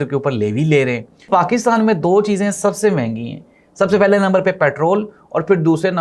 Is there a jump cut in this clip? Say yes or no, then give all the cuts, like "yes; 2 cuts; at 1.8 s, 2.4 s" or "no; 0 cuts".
yes; 1 cut; at 1.3 s